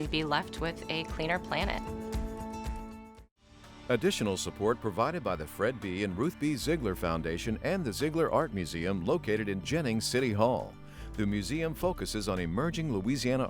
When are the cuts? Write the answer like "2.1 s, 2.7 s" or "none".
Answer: 3.7 s